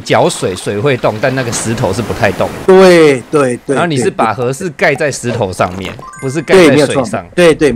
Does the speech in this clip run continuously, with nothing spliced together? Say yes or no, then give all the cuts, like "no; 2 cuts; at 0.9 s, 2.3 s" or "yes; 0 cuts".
yes; 0 cuts